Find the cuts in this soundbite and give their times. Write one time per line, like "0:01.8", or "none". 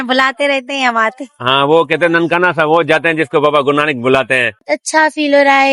0:04.6